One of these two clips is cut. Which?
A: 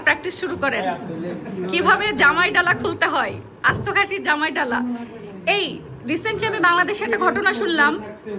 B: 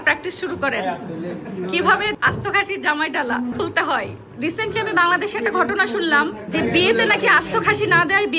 B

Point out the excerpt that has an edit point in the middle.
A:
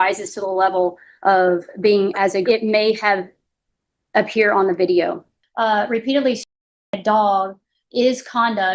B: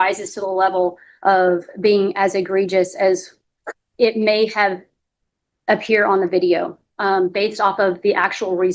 A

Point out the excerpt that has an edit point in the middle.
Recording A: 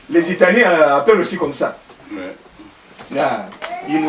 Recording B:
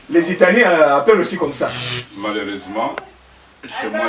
B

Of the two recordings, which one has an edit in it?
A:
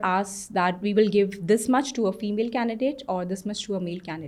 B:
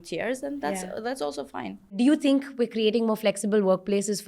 B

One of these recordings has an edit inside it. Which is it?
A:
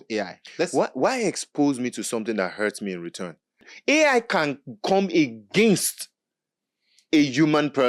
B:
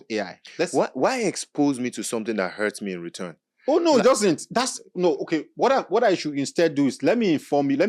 A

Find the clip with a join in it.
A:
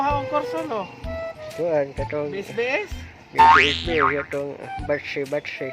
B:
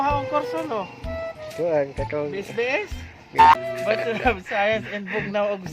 B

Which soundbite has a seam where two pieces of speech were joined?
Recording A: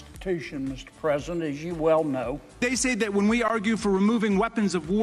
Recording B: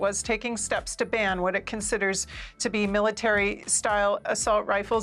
A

